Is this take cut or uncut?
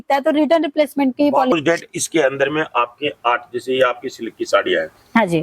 cut